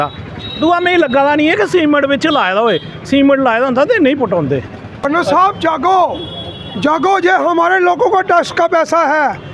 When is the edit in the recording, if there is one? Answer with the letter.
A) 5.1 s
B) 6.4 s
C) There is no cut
A